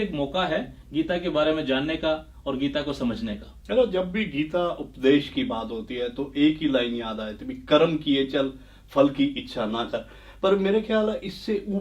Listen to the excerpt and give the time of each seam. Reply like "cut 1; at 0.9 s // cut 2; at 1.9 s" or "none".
none